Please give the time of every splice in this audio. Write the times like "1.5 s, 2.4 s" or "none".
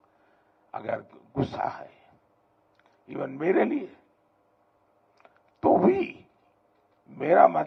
none